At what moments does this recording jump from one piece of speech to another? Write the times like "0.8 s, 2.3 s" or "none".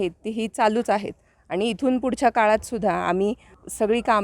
none